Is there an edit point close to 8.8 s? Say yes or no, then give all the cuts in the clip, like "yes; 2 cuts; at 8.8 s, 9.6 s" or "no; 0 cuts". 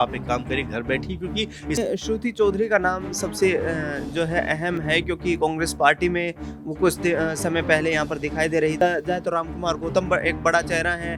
yes; 2 cuts; at 1.8 s, 8.8 s